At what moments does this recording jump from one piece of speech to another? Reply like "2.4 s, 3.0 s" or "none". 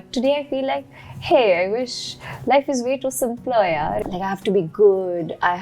4.0 s